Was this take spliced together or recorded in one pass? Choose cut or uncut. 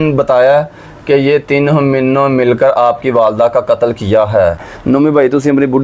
cut